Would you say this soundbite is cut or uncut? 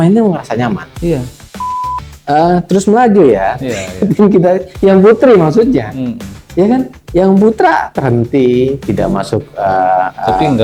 cut